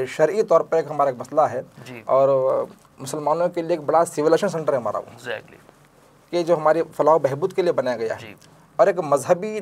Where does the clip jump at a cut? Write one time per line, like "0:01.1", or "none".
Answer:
none